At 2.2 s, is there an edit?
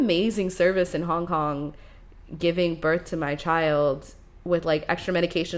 no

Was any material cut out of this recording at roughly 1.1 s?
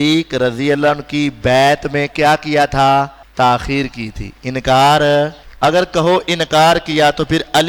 no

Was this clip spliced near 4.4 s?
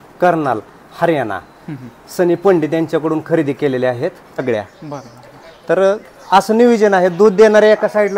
yes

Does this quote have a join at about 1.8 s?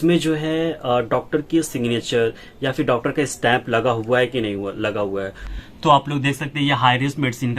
no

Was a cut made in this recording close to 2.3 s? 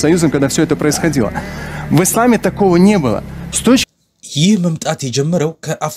no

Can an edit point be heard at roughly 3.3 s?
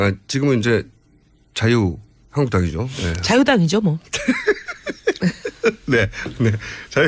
yes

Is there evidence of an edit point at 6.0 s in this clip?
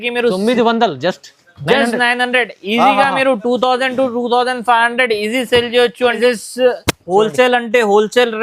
yes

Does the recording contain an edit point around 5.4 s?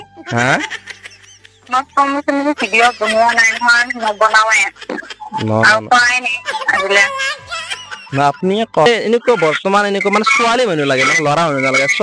no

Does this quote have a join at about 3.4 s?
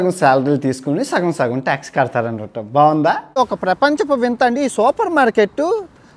yes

